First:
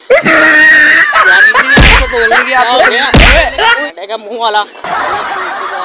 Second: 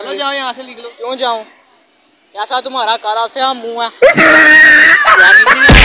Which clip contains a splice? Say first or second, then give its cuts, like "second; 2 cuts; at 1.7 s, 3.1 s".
first; 1 cut; at 3.8 s